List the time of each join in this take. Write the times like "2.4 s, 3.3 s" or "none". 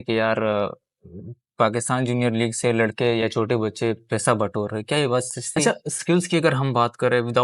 5.4 s